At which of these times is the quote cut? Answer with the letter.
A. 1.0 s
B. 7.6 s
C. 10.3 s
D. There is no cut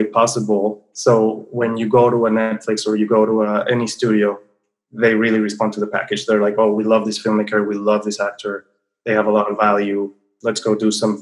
C